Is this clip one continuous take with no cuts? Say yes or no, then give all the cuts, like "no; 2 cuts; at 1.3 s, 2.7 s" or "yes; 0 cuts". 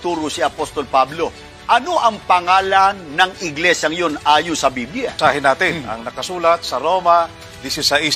no; 1 cut; at 5.2 s